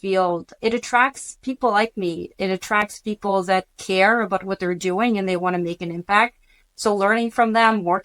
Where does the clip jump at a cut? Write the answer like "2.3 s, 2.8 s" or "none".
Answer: none